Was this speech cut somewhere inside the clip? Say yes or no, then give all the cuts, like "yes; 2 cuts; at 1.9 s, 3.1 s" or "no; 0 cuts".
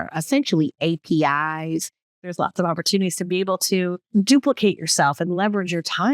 yes; 2 cuts; at 2.3 s, 4.0 s